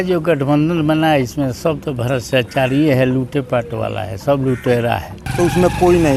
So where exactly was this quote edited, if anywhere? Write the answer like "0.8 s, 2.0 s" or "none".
5.2 s